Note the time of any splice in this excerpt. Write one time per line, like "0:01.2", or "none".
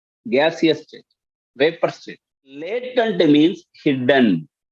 0:02.9